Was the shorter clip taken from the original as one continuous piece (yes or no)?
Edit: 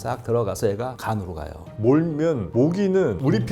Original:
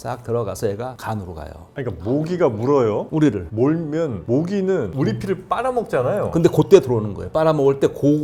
no